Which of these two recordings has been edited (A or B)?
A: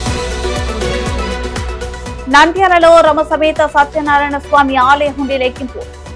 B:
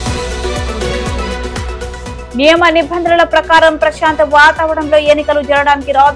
A